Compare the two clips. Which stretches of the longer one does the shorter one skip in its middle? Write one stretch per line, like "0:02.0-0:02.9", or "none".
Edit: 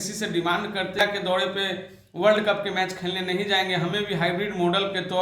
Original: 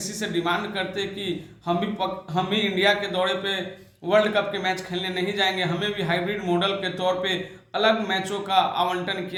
0:01.0-0:02.9